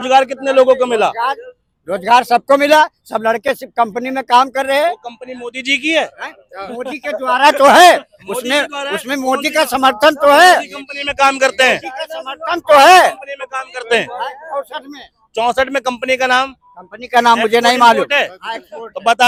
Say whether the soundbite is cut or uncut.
uncut